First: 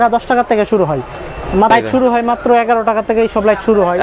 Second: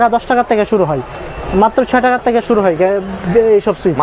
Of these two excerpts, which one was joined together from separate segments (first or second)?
first